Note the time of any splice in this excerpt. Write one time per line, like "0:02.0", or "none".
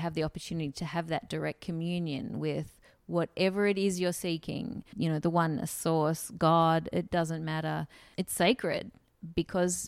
0:04.8
0:08.0